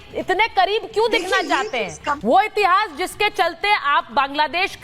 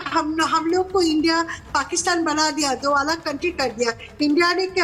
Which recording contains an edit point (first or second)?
first